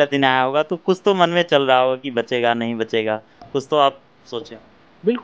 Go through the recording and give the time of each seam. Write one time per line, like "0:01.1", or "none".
none